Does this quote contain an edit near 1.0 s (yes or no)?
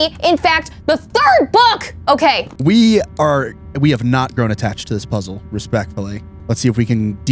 no